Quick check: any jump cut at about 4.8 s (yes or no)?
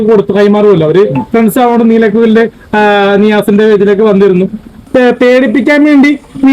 yes